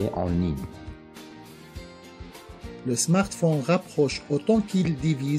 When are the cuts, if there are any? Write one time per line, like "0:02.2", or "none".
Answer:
0:00.9
0:02.8